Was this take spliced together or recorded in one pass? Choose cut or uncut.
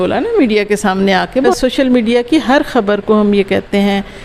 cut